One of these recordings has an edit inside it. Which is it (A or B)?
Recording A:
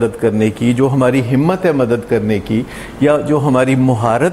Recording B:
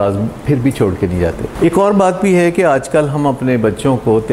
B